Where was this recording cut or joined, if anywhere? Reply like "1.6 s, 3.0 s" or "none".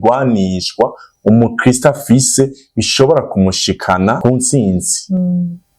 4.2 s